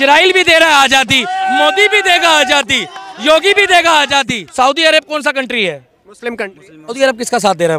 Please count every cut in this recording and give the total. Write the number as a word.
two